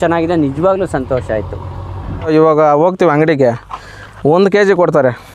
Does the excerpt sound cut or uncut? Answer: cut